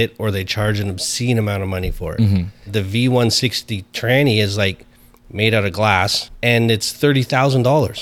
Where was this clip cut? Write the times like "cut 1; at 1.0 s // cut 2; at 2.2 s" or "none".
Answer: cut 1; at 2.7 s // cut 2; at 6.2 s